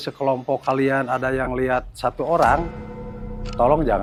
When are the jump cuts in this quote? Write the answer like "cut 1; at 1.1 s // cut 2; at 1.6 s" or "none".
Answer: none